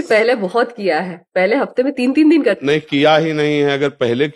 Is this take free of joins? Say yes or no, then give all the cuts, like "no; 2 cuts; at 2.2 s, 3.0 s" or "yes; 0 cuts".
yes; 0 cuts